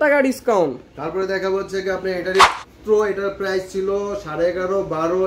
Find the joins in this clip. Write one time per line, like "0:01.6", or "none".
0:02.4